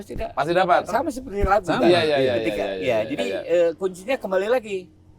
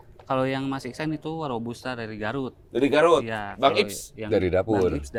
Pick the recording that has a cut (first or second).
first